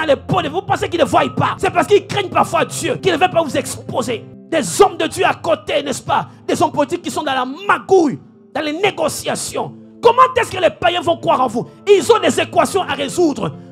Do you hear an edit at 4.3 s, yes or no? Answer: yes